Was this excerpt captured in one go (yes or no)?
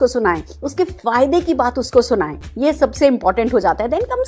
yes